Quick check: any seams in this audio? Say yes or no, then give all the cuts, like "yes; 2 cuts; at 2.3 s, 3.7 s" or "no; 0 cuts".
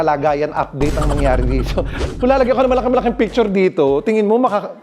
yes; 1 cut; at 1.9 s